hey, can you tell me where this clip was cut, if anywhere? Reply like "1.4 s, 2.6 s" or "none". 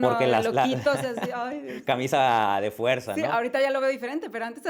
none